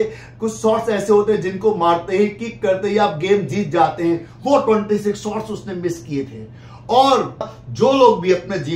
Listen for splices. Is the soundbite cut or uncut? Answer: cut